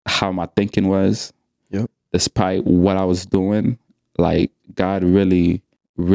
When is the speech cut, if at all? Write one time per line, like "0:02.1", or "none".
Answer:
none